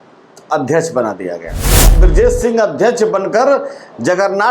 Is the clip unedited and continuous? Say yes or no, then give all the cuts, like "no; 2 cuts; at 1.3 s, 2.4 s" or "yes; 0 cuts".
no; 1 cut; at 1.9 s